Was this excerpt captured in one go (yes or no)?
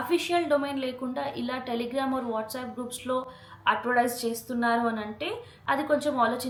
yes